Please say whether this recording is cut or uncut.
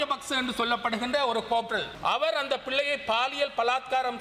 cut